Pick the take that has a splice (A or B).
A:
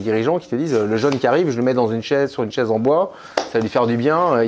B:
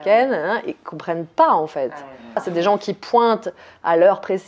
B